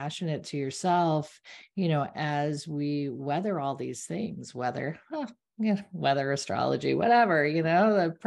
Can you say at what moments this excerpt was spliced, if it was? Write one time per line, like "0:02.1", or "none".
none